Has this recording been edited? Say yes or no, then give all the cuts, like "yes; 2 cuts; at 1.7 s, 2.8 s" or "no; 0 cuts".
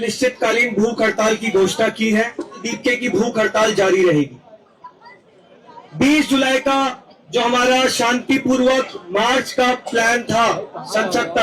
yes; 1 cut; at 2.7 s